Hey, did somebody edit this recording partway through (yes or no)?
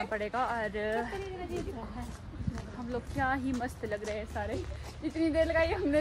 no